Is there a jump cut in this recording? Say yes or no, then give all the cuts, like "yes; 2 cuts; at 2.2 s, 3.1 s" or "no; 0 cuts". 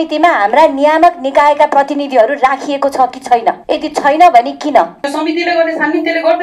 yes; 2 cuts; at 3.6 s, 5.0 s